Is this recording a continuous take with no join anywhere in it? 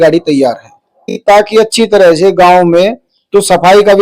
no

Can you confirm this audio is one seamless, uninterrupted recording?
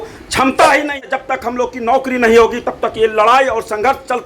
no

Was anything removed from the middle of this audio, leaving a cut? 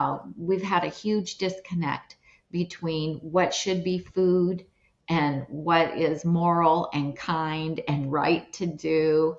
no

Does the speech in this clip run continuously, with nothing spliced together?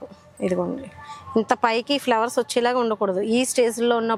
yes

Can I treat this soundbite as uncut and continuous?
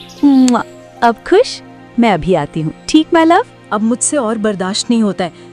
no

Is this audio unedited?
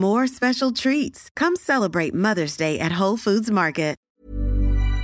no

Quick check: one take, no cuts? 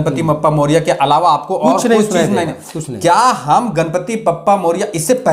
yes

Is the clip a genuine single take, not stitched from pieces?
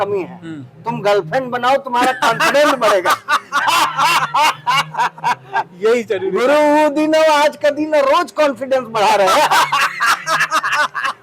yes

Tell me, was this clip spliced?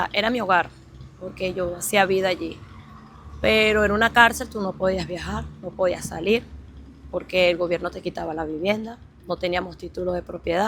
no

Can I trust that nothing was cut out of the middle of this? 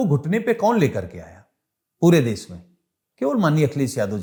yes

